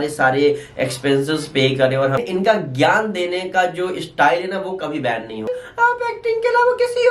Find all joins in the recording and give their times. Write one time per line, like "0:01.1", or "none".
0:02.2
0:05.5